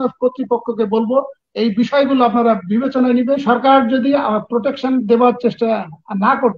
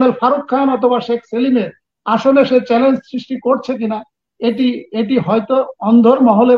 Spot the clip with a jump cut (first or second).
first